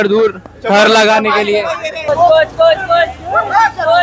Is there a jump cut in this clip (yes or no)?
yes